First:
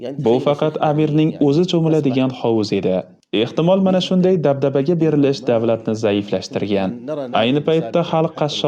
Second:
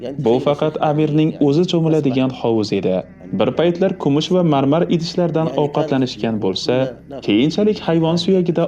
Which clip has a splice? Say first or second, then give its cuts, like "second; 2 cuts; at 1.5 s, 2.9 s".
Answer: second; 1 cut; at 3.2 s